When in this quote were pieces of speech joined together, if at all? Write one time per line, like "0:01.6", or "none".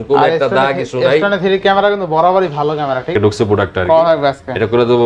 0:03.1